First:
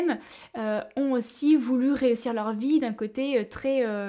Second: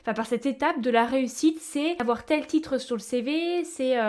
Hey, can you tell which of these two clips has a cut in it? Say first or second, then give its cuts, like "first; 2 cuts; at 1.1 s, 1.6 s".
second; 1 cut; at 2.0 s